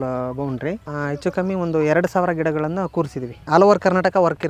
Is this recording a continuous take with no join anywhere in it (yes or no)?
no